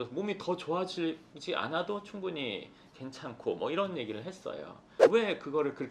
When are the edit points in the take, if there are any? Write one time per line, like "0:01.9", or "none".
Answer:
0:04.8